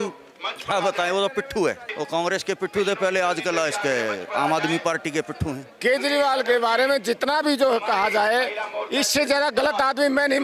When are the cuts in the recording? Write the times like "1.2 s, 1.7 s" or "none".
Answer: 1.9 s, 5.6 s